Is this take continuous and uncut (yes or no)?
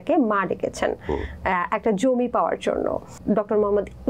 no